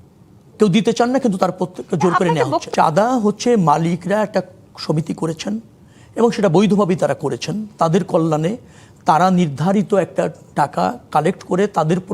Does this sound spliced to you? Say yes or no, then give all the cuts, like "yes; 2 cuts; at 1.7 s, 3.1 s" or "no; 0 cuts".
yes; 1 cut; at 2.7 s